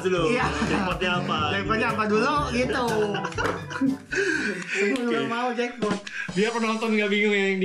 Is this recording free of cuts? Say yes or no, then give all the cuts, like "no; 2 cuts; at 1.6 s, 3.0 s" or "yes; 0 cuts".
yes; 0 cuts